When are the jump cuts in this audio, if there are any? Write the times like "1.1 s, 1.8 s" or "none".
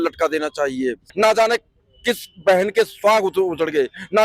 1.1 s